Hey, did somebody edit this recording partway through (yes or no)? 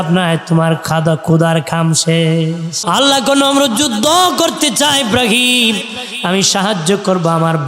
yes